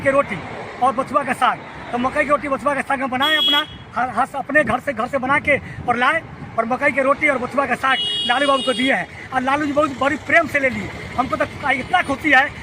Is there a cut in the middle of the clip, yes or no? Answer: no